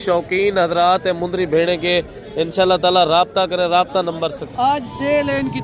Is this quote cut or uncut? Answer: cut